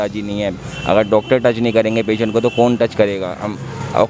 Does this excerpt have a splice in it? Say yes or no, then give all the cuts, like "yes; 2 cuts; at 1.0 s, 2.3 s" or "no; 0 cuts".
no; 0 cuts